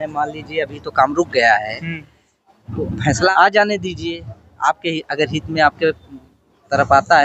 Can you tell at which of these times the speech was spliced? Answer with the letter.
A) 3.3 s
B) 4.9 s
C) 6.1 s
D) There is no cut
A